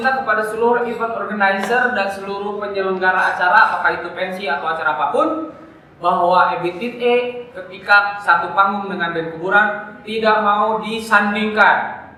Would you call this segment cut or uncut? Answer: uncut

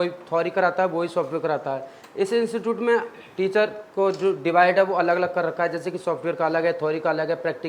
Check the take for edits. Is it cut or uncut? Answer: uncut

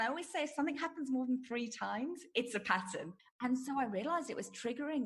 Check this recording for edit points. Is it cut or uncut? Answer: cut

